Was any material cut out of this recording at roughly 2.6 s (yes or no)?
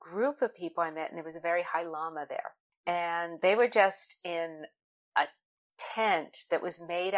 yes